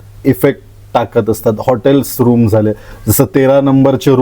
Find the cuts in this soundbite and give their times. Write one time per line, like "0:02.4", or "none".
none